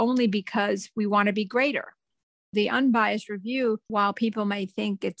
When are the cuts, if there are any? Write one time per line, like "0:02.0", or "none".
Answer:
0:02.2
0:03.8